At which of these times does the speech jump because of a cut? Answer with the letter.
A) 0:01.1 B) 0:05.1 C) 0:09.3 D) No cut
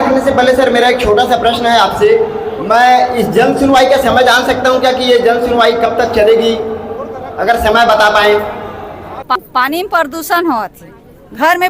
C